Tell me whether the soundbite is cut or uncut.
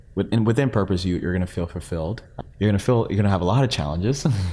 cut